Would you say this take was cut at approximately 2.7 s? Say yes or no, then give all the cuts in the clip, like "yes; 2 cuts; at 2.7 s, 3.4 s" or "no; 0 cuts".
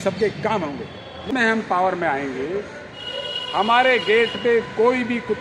no; 1 cut; at 1.3 s